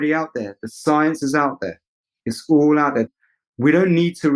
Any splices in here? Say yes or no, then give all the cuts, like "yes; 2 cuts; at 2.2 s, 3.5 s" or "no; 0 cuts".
yes; 1 cut; at 3.1 s